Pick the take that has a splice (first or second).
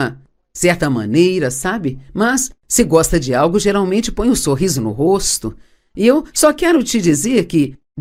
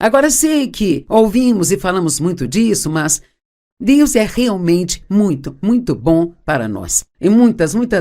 second